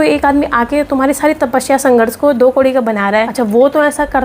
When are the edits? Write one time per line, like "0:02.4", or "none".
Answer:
0:03.3